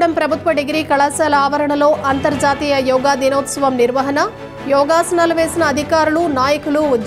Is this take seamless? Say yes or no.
yes